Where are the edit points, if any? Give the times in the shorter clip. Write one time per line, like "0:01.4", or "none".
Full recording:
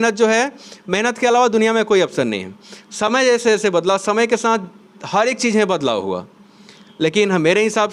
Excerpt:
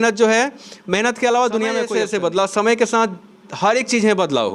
0:01.9